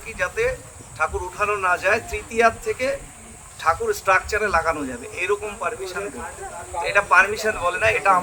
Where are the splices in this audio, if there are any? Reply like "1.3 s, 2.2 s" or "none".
none